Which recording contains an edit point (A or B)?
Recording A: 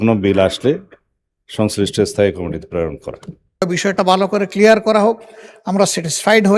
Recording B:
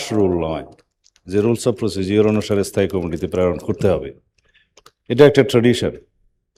A